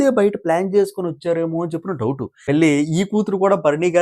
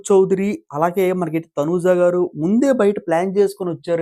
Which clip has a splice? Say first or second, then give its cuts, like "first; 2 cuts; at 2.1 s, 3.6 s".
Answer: first; 1 cut; at 2.4 s